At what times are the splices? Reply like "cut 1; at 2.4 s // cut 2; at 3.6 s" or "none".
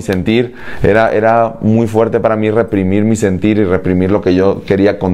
none